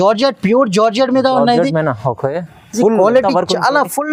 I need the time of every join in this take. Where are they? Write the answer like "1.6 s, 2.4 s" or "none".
none